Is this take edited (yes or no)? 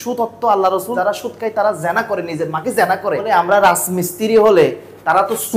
yes